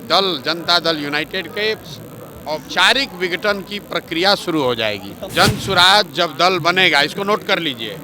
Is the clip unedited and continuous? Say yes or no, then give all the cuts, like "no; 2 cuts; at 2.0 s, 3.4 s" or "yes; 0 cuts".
no; 1 cut; at 5.1 s